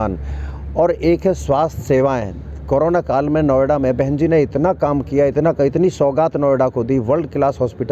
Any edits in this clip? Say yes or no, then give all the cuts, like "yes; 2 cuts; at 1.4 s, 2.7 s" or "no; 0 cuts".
no; 0 cuts